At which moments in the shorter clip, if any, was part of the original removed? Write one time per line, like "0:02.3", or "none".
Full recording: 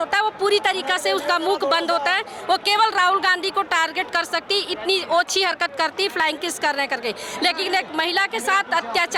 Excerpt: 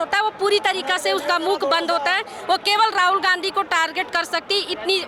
none